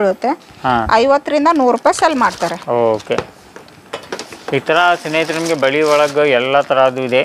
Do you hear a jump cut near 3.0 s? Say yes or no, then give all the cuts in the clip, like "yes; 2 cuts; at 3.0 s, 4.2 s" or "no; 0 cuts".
no; 0 cuts